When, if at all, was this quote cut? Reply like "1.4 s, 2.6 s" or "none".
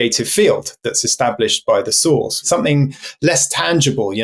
2.4 s